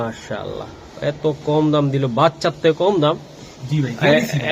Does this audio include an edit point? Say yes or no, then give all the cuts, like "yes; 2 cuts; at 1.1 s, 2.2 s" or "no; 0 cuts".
no; 0 cuts